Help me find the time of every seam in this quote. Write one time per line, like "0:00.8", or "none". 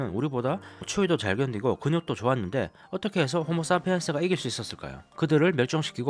none